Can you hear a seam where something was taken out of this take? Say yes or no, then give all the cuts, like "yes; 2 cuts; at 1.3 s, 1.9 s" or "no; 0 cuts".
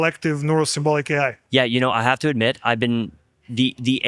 no; 0 cuts